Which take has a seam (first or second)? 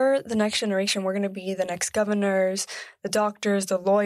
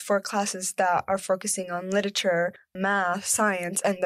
second